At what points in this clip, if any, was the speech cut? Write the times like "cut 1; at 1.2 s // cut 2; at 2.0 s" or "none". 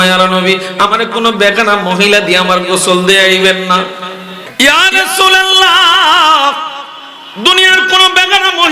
cut 1; at 4.4 s